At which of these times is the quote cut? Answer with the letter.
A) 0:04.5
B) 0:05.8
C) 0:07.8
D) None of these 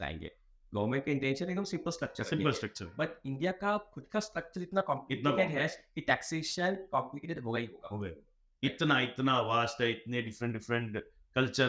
D